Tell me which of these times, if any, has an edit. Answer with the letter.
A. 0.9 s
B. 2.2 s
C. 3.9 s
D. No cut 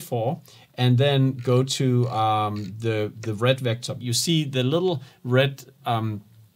C